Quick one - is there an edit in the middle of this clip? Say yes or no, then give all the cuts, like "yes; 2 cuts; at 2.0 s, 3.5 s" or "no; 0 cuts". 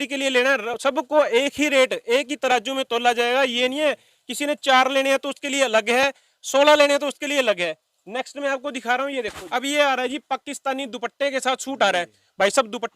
yes; 1 cut; at 9.4 s